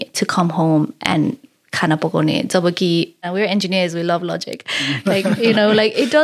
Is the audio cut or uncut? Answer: cut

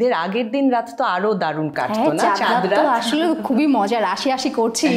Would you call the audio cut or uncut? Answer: uncut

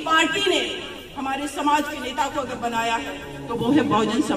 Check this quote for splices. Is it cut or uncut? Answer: uncut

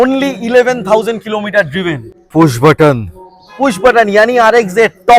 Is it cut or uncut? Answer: uncut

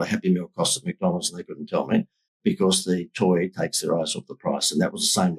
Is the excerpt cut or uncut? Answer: uncut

